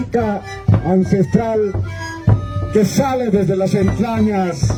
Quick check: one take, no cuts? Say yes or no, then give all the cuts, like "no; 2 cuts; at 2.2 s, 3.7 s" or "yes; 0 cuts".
yes; 0 cuts